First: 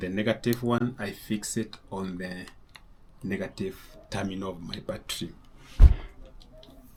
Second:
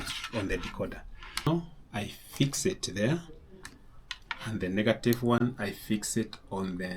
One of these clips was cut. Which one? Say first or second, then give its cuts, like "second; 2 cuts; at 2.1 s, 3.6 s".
second; 1 cut; at 1.5 s